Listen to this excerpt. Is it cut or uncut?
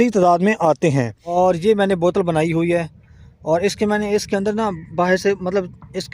cut